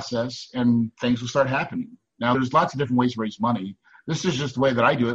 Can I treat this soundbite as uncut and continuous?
no; 1 cut; at 0.9 s

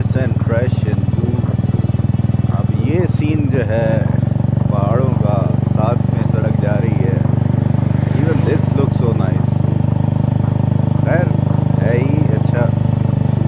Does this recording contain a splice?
no; 0 cuts

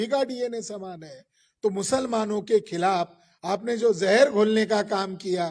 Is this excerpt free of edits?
yes; 0 cuts

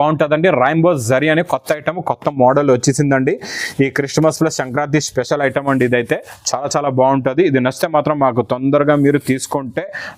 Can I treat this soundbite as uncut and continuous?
yes; 0 cuts

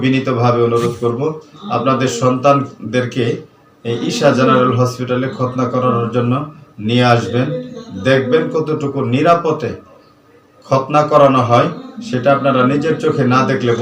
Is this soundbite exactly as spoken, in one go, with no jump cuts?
yes; 0 cuts

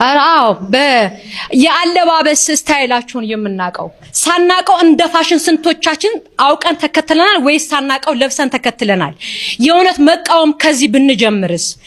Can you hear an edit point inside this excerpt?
no; 0 cuts

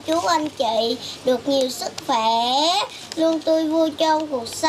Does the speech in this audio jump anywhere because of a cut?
no; 0 cuts

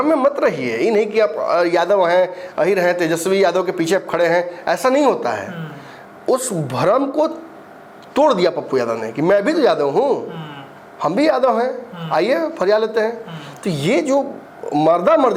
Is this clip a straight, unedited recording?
yes; 0 cuts

